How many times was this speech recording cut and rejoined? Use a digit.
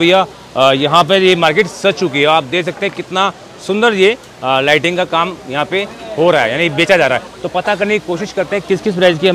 0